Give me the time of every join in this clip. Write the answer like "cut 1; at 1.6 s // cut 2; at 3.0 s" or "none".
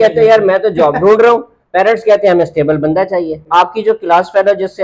cut 1; at 3.4 s